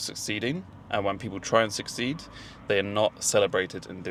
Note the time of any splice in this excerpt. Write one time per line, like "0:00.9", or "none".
none